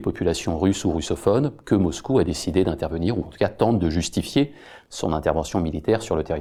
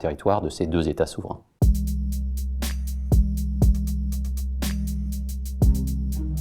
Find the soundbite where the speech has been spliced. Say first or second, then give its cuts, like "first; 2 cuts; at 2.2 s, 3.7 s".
second; 1 cut; at 1.5 s